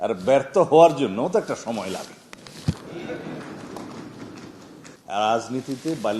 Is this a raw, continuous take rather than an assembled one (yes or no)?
no